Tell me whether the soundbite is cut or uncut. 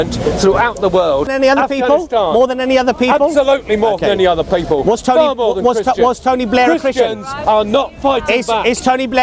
cut